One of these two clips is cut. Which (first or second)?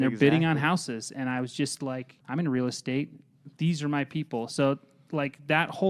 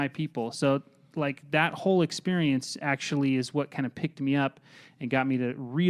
first